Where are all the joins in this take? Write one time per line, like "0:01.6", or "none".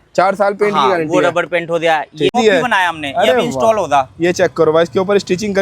0:02.3